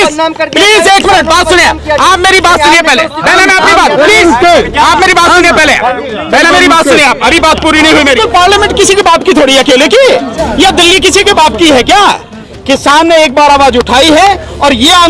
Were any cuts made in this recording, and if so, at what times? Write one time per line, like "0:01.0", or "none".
0:08.2
0:12.4